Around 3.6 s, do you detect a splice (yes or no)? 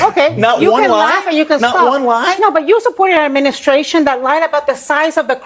no